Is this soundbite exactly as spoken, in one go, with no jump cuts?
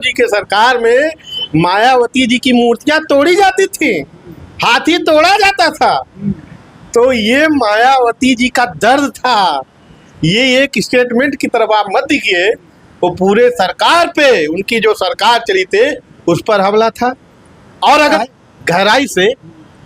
no; 1 cut; at 18.2 s

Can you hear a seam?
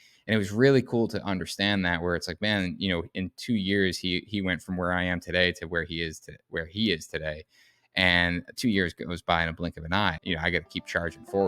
yes; 1 cut; at 10.2 s

